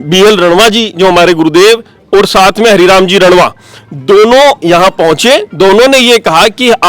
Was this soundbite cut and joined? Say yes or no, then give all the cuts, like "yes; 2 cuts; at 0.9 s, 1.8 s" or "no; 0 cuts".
no; 0 cuts